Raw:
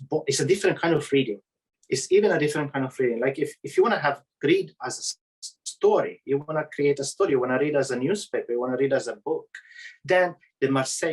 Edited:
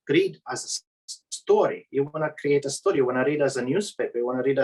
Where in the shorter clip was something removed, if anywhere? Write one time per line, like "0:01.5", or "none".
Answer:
none